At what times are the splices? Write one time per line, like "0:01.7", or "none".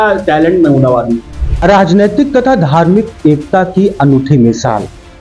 0:01.6